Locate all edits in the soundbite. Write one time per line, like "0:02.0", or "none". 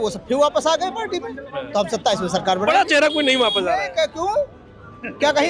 none

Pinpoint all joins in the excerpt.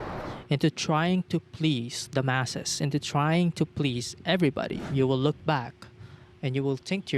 0:04.9

